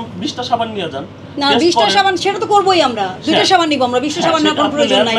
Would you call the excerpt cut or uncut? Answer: uncut